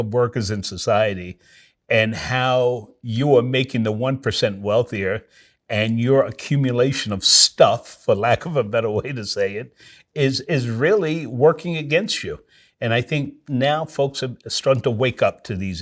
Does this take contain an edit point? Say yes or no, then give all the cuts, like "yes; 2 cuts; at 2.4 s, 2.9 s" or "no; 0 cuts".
no; 0 cuts